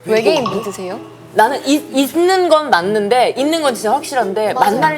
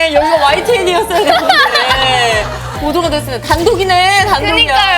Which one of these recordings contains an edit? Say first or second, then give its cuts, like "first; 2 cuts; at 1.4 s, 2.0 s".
first; 1 cut; at 1.2 s